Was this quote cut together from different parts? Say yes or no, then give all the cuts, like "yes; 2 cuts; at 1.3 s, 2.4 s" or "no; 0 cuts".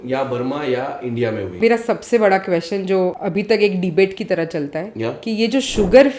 yes; 2 cuts; at 1.6 s, 3.2 s